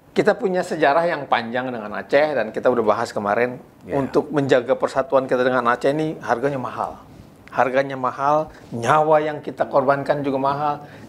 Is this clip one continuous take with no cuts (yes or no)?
yes